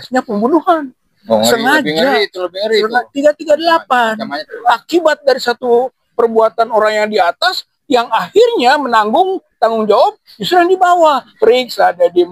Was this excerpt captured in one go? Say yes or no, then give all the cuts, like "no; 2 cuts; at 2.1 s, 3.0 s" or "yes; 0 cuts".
no; 3 cuts; at 1.2 s, 4.5 s, 11.3 s